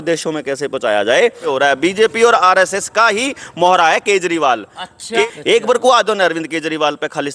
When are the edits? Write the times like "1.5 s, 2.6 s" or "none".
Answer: 1.4 s, 5.2 s